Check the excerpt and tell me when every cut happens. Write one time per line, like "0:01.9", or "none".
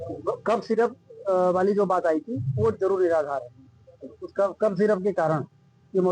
none